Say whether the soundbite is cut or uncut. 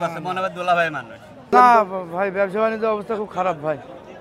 cut